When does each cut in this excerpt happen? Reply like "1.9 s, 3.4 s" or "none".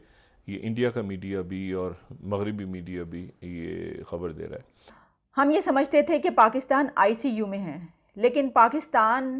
5.1 s